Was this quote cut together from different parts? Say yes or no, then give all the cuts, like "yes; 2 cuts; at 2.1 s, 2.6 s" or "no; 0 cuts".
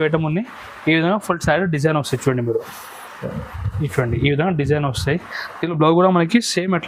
no; 0 cuts